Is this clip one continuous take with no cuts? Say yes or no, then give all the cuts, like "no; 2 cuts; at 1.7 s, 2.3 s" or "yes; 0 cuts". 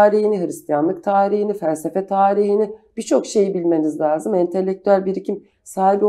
yes; 0 cuts